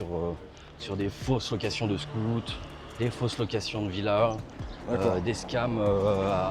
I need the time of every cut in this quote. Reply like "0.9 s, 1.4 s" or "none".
none